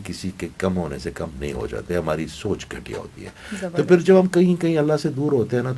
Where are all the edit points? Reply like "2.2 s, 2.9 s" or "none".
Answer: none